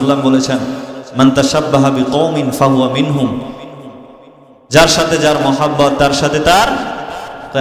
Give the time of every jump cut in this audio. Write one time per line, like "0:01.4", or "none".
none